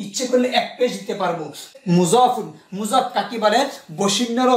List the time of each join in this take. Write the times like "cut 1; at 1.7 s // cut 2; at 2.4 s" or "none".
cut 1; at 1.8 s